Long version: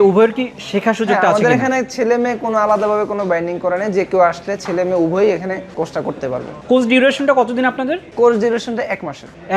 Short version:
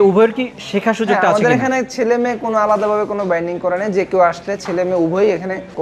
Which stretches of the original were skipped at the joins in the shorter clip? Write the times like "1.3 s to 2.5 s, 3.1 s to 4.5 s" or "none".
none